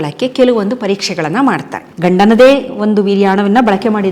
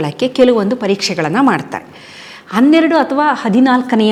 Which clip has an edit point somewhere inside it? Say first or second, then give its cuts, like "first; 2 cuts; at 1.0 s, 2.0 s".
first; 1 cut; at 1.8 s